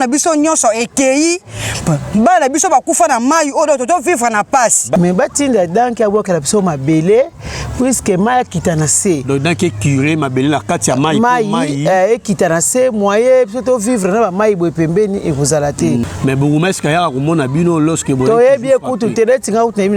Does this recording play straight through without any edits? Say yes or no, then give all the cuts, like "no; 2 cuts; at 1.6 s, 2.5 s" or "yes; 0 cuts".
no; 2 cuts; at 4.9 s, 16.0 s